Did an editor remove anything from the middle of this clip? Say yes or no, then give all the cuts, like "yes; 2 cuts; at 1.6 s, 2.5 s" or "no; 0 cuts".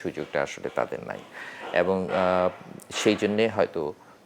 no; 0 cuts